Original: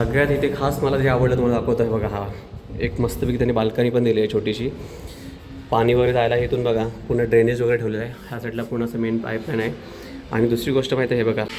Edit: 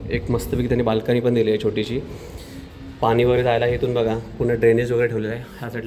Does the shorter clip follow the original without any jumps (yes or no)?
yes